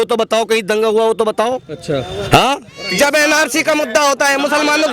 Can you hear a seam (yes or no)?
yes